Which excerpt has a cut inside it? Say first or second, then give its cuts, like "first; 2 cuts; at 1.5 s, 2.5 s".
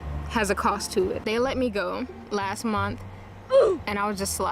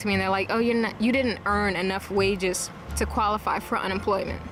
first; 1 cut; at 1.2 s